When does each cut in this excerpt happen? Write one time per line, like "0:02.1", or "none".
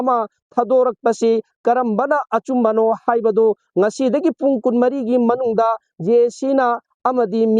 none